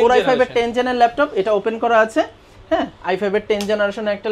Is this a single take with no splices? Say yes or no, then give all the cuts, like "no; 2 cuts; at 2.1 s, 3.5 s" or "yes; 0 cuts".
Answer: yes; 0 cuts